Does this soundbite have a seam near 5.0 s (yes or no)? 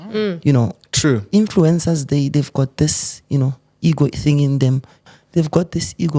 yes